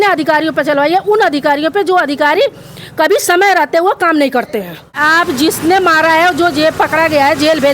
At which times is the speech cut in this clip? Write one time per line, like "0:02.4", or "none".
0:05.0